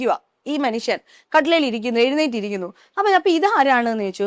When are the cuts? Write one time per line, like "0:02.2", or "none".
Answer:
none